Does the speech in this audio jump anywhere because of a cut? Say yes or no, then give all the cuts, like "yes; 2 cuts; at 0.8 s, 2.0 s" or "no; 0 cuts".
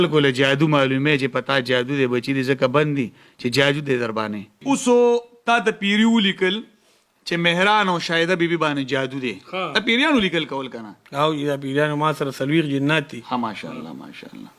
yes; 1 cut; at 4.6 s